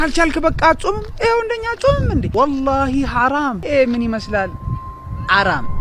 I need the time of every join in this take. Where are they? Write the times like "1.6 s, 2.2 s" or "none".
2.3 s, 3.6 s